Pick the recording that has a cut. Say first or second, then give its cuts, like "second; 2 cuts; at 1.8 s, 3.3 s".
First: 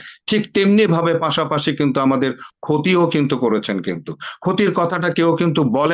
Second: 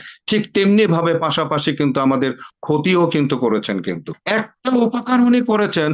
second; 1 cut; at 4.2 s